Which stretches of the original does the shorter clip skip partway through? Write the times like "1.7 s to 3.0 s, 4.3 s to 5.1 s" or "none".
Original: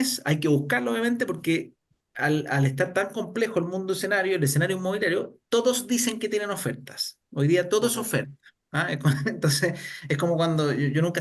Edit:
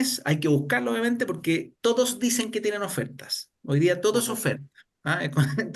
1.7 s to 5.4 s